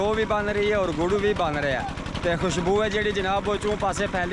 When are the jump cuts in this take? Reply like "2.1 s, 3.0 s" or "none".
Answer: none